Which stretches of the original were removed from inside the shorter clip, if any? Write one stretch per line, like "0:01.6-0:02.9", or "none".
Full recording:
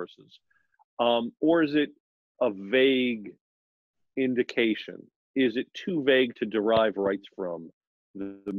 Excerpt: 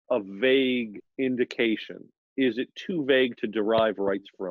0:03.3-0:04.0